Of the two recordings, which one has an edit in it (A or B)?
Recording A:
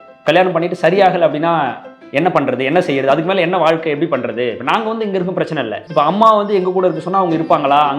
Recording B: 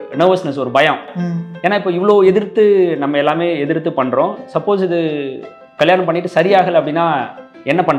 A